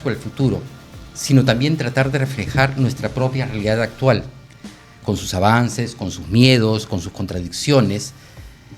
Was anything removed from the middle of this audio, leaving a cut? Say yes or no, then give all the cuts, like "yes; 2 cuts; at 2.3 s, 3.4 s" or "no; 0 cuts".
no; 0 cuts